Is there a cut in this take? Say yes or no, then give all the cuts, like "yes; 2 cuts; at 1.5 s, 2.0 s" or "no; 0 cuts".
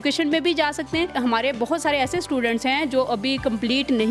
yes; 1 cut; at 1.1 s